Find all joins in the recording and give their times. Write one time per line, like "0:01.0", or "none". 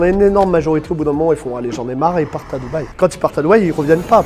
none